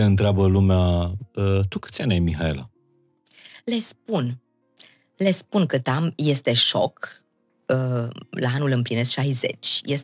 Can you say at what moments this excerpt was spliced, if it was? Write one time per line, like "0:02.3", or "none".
none